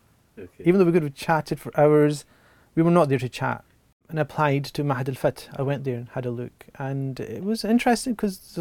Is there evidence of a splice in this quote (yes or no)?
yes